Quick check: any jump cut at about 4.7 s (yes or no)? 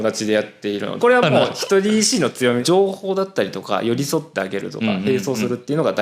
no